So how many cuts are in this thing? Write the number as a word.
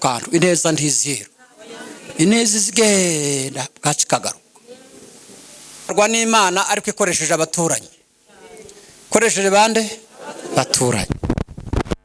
one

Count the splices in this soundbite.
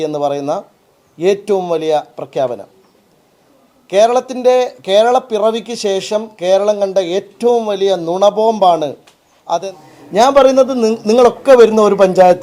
one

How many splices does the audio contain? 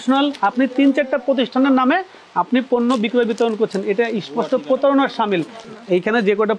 one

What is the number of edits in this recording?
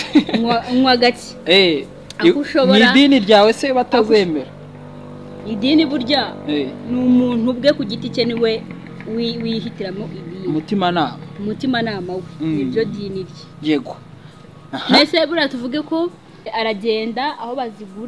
one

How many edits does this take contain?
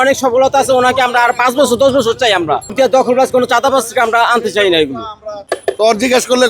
two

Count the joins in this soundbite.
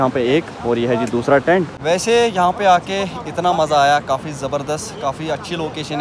one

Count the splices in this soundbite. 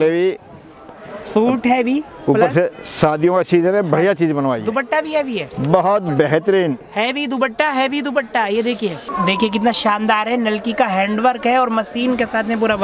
one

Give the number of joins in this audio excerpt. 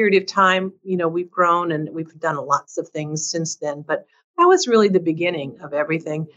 zero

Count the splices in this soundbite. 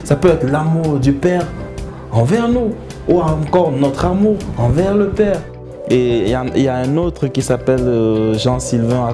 one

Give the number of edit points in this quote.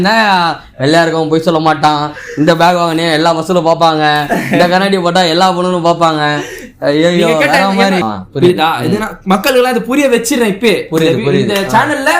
one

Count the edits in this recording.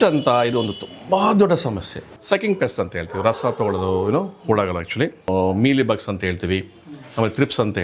two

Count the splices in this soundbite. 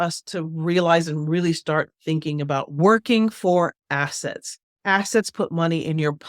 one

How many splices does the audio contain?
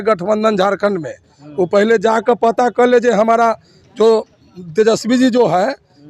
zero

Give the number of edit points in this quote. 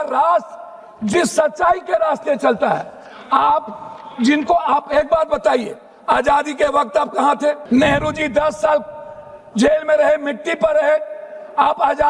one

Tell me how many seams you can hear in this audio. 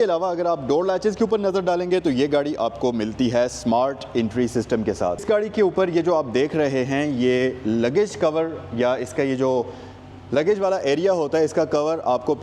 one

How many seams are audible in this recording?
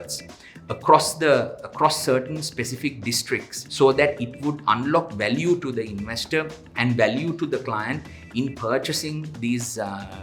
one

